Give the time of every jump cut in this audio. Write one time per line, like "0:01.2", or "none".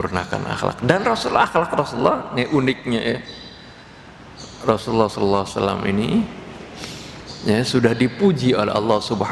none